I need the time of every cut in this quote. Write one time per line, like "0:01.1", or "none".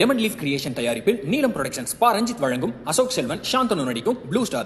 none